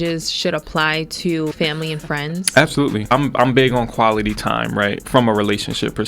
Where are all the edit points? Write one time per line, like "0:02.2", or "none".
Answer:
0:01.5
0:03.1